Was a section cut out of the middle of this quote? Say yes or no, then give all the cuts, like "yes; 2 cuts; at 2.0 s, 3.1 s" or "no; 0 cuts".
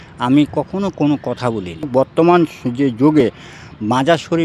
yes; 1 cut; at 1.9 s